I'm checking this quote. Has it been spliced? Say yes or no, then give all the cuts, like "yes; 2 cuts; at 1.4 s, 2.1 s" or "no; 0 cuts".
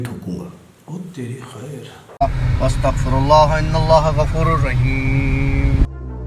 yes; 1 cut; at 2.1 s